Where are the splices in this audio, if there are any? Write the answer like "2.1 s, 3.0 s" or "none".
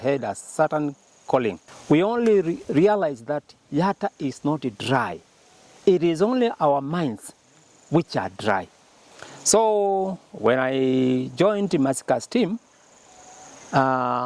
1.7 s